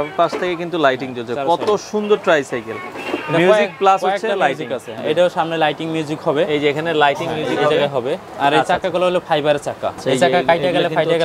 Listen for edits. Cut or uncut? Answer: cut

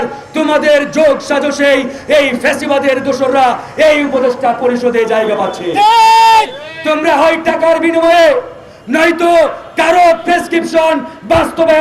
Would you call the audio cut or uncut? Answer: uncut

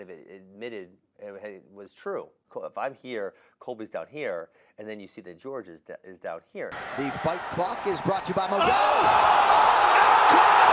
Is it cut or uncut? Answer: uncut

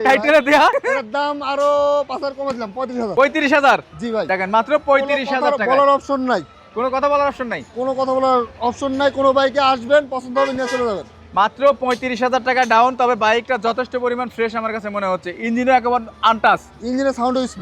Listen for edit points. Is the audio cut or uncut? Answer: uncut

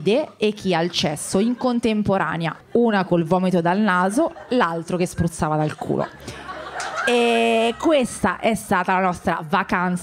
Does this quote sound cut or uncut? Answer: uncut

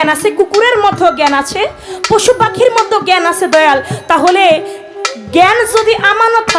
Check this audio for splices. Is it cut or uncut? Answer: uncut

